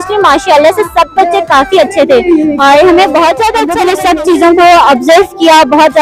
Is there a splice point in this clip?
yes; 1 cut; at 3.6 s

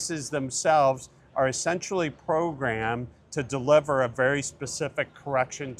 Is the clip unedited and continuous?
yes; 0 cuts

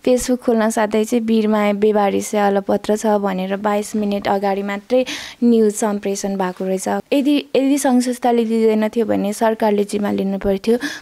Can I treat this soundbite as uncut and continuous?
no; 1 cut; at 7.0 s

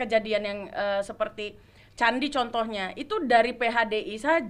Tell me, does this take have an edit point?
no; 0 cuts

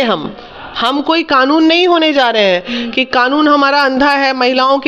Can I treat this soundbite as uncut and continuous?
yes; 0 cuts

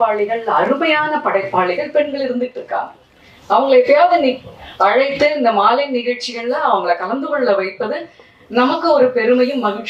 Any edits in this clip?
no; 0 cuts

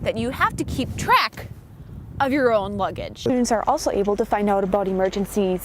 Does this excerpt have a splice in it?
yes; 1 cut; at 3.2 s

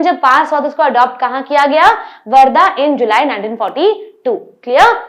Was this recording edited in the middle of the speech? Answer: no; 0 cuts

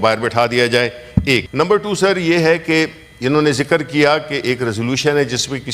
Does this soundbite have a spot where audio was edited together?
yes; 1 cut; at 1.5 s

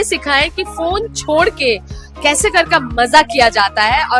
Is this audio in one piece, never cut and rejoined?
yes; 0 cuts

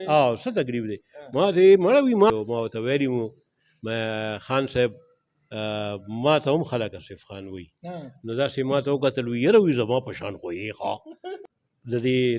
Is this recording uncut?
no; 2 cuts; at 2.3 s, 11.3 s

